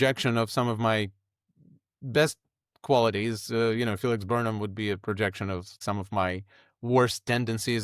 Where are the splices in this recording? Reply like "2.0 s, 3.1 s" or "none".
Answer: 5.7 s